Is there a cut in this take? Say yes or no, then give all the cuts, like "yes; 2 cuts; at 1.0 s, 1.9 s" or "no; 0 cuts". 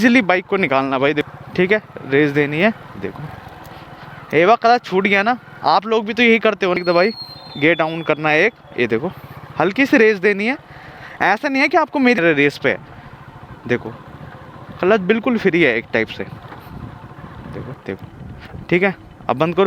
yes; 4 cuts; at 1.2 s, 6.8 s, 12.2 s, 17.8 s